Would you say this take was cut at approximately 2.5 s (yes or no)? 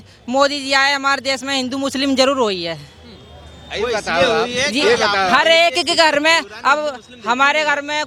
no